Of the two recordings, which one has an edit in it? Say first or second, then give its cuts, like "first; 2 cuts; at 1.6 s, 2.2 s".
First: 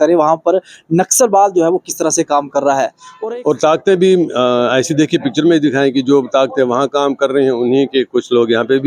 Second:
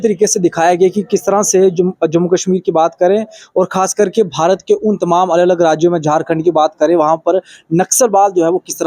first; 1 cut; at 3.0 s